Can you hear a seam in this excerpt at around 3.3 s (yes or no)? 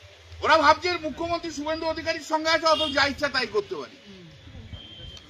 no